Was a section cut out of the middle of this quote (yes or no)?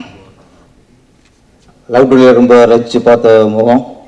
no